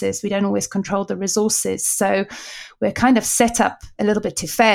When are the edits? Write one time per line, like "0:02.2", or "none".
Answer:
0:03.8